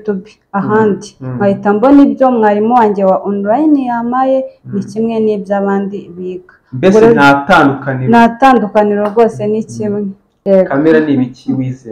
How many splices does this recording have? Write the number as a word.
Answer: one